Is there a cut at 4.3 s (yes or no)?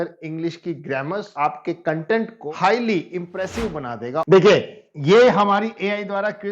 yes